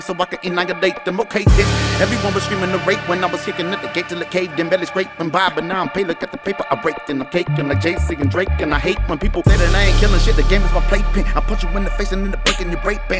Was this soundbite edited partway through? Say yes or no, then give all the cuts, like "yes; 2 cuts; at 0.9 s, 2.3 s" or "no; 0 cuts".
no; 0 cuts